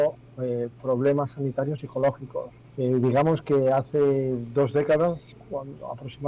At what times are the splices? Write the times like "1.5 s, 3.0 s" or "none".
2.5 s, 5.3 s